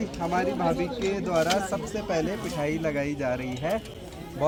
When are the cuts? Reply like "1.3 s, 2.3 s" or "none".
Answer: none